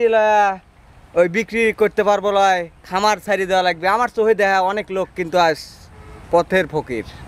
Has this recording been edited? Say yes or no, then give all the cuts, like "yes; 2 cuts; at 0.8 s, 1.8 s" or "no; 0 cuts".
no; 0 cuts